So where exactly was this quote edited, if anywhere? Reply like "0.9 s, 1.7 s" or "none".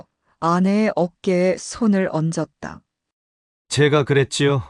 3.5 s